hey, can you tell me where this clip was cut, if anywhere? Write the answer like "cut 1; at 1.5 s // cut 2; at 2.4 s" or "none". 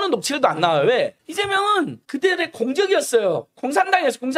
none

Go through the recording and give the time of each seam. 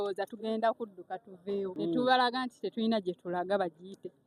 cut 1; at 1.7 s

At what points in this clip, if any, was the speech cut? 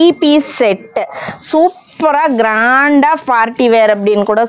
none

